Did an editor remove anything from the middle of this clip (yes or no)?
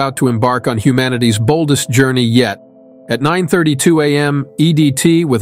yes